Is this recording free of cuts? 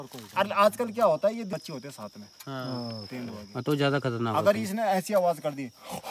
no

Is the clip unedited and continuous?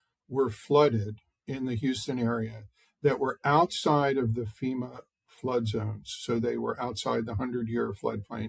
yes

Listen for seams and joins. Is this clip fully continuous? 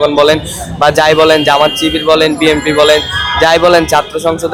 yes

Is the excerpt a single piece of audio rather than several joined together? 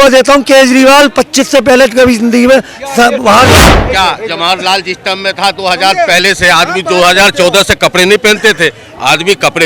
no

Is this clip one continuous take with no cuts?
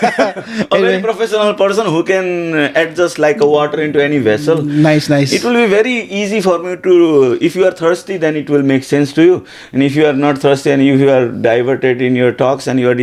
yes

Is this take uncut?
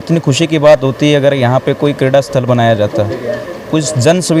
yes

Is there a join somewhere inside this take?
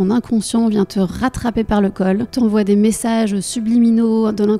yes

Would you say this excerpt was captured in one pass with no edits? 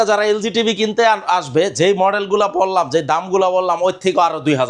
yes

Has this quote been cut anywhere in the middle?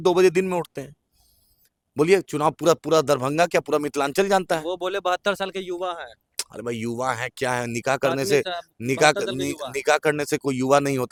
no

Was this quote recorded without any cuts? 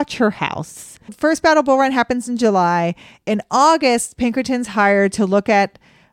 no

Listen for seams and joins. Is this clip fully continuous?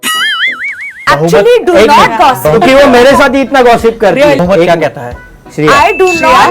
no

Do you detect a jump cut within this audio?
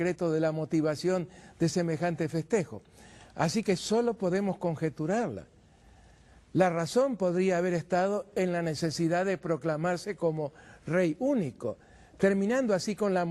no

